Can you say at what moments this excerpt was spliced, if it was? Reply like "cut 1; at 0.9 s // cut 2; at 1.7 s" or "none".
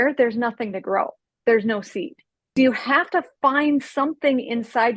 cut 1; at 2.5 s